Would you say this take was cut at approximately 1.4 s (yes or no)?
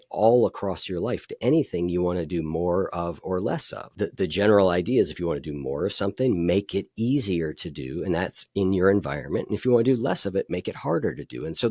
no